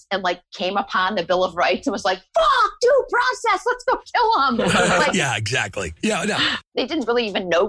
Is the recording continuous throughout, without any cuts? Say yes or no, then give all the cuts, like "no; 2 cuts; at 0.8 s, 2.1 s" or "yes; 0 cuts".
no; 1 cut; at 6.7 s